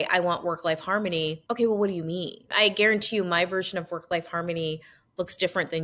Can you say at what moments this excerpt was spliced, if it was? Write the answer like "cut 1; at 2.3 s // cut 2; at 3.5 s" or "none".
cut 1; at 1.4 s // cut 2; at 2.5 s